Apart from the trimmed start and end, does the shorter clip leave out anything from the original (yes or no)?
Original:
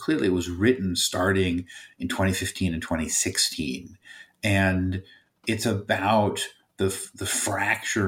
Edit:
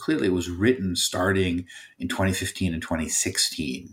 no